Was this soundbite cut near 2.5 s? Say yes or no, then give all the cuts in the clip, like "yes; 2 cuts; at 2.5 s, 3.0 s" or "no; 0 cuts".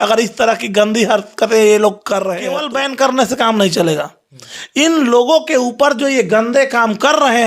yes; 1 cut; at 2.5 s